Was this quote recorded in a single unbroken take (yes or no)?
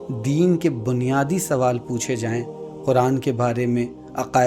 yes